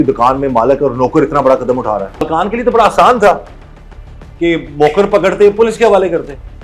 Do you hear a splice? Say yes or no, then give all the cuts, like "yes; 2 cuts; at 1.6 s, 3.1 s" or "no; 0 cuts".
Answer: yes; 1 cut; at 2.2 s